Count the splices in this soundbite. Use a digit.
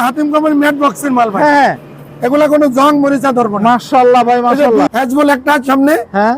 1